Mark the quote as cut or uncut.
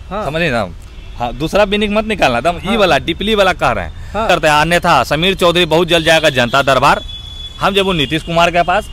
cut